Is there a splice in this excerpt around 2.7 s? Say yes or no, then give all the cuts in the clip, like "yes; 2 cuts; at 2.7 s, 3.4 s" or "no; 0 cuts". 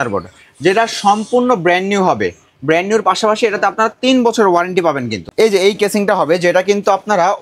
no; 1 cut; at 5.2 s